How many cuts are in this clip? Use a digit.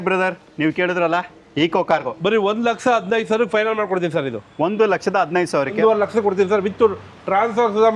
2